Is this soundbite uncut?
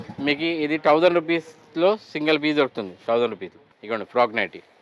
no; 1 cut; at 3.7 s

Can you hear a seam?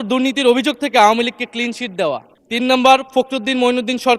yes; 1 cut; at 2.3 s

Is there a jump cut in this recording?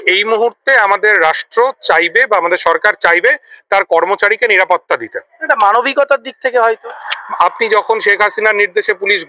no; 0 cuts

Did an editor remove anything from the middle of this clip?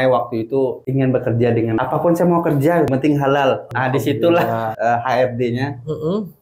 yes; 5 cuts; at 0.8 s, 1.8 s, 2.9 s, 3.7 s, 4.7 s

